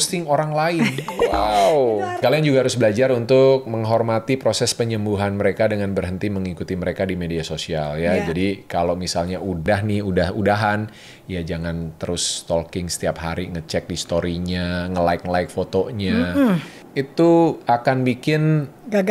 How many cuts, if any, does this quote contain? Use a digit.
3